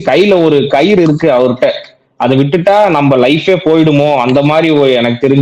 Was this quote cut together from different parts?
no; 0 cuts

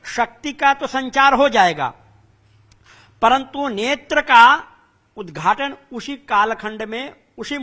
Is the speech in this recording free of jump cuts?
yes; 0 cuts

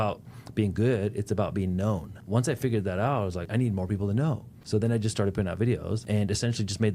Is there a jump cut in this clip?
yes; 4 cuts; at 2.2 s, 3.5 s, 4.5 s, 6.0 s

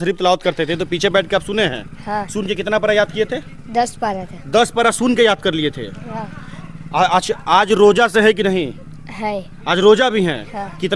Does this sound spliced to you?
no; 0 cuts

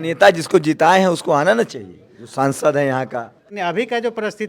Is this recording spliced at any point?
yes; 1 cut; at 3.5 s

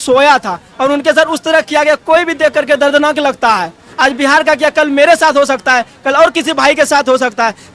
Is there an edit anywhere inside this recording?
no; 0 cuts

